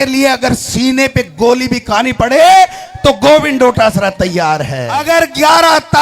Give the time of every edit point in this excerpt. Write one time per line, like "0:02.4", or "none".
0:04.9